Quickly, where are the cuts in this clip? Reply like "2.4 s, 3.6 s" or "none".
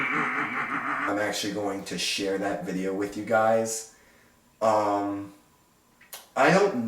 1.1 s